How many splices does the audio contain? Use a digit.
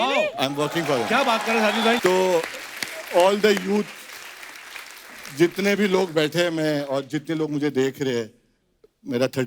1